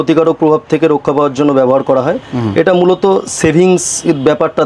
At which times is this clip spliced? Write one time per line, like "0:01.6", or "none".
none